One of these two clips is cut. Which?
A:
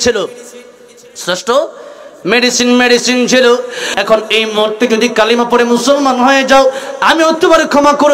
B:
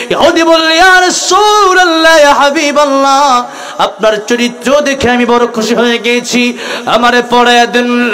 A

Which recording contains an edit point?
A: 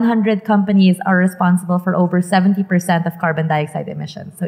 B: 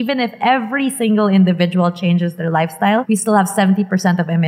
B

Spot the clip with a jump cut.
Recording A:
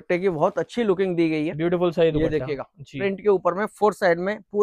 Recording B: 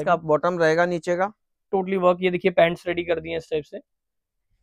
B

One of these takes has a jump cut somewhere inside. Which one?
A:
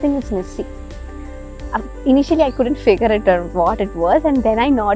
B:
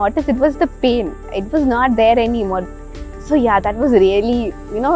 B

